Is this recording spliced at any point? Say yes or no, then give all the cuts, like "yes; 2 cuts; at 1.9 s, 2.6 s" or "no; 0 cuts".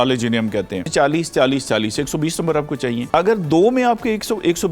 yes; 2 cuts; at 0.9 s, 3.0 s